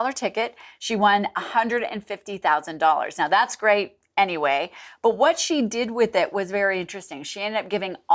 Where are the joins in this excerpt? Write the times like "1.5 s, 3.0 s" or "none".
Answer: none